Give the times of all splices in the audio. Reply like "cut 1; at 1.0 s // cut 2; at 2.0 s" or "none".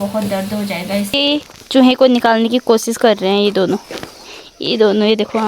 cut 1; at 1.2 s